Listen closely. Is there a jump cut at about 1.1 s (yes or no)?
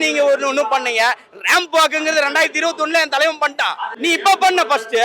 no